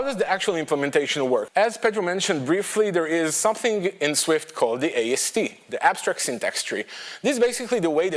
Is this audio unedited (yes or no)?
no